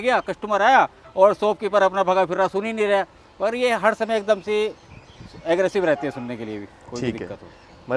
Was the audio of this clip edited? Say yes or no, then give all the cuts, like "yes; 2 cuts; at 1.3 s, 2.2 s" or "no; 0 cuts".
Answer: no; 0 cuts